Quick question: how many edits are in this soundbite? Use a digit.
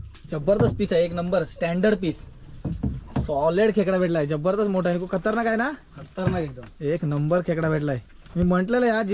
0